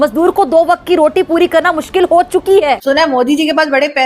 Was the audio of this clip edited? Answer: yes; 1 cut; at 2.8 s

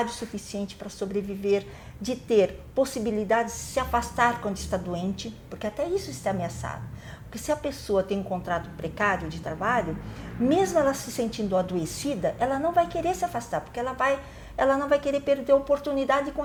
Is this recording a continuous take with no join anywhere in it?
yes; 0 cuts

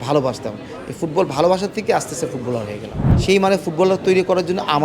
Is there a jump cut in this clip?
yes; 1 cut; at 3.0 s

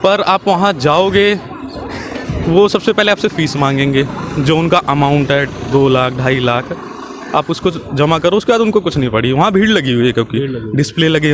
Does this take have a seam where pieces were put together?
no; 0 cuts

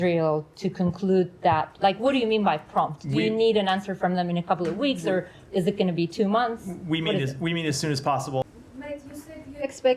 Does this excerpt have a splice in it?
yes; 1 cut; at 8.4 s

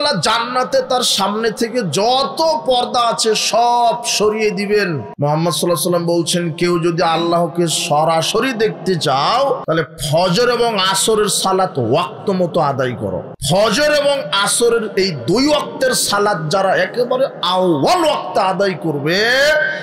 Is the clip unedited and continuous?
no; 3 cuts; at 5.1 s, 9.6 s, 13.3 s

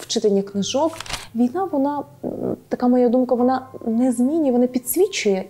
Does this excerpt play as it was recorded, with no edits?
no; 1 cut; at 1.0 s

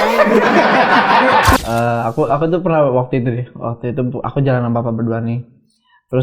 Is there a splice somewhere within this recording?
yes; 1 cut; at 1.6 s

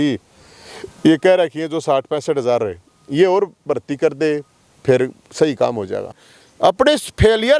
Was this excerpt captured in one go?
no; 1 cut; at 6.2 s

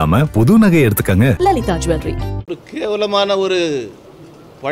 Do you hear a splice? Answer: yes; 1 cut; at 2.3 s

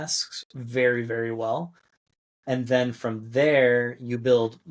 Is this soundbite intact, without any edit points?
yes; 0 cuts

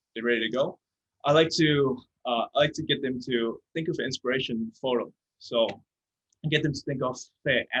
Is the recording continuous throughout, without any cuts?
yes; 0 cuts

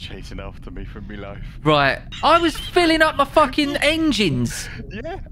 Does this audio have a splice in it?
yes; 1 cut; at 2.1 s

